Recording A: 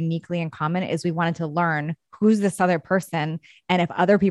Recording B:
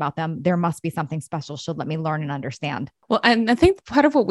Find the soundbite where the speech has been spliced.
B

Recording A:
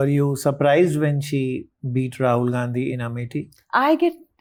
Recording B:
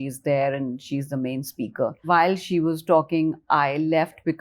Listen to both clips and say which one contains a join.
B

